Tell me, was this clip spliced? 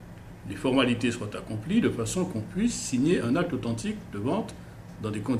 yes; 1 cut; at 1.6 s

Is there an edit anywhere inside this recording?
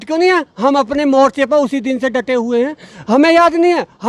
no; 0 cuts

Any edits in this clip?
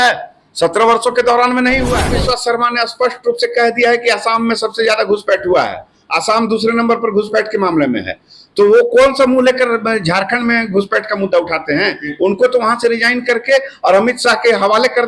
yes; 1 cut; at 2.1 s

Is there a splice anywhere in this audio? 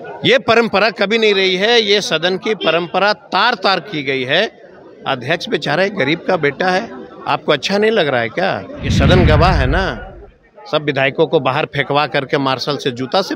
yes; 1 cut; at 8.8 s

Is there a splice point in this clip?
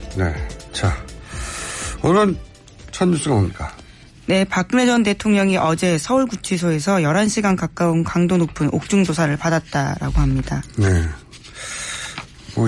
yes; 1 cut; at 1.7 s

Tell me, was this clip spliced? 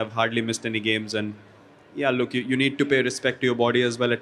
no; 0 cuts

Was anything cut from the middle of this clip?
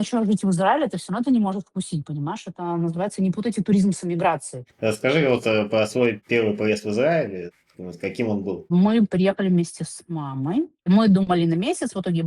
no; 0 cuts

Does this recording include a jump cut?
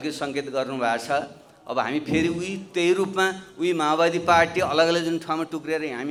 no; 0 cuts

